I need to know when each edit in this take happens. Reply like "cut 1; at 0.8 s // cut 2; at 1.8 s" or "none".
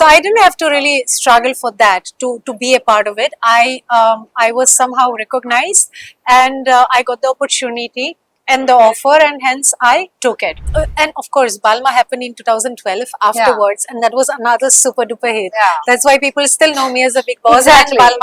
cut 1; at 10.7 s